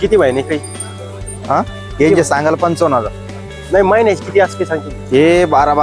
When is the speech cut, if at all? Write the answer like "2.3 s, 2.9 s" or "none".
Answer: none